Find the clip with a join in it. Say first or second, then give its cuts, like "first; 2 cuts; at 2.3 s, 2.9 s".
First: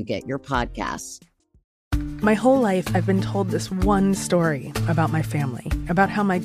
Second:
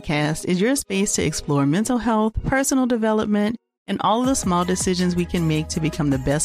first; 1 cut; at 1.8 s